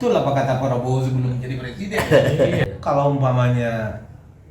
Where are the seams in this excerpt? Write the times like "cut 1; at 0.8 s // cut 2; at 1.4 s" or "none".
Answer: cut 1; at 2.6 s